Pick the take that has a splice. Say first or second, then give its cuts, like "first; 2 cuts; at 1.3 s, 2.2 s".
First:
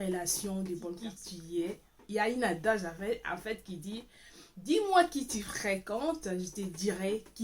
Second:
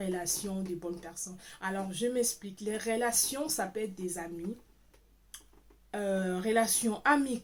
first; 1 cut; at 1.7 s